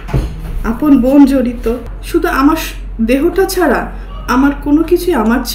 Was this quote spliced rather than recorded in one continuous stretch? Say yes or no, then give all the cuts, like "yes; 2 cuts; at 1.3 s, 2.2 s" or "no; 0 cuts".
yes; 1 cut; at 1.9 s